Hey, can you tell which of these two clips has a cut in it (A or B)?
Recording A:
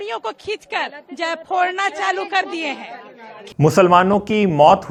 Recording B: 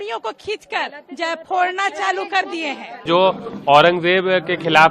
B